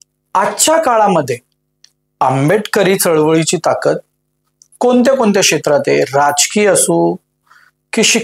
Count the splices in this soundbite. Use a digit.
0